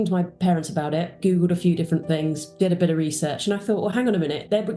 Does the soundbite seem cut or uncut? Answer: cut